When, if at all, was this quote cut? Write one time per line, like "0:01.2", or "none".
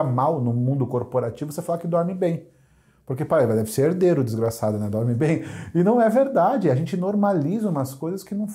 none